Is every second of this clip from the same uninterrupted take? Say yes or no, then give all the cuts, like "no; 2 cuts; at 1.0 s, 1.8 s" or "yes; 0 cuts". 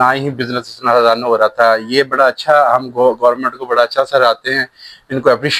yes; 0 cuts